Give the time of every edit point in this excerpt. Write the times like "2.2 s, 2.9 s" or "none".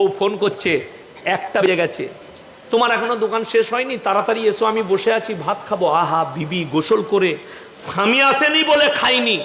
1.7 s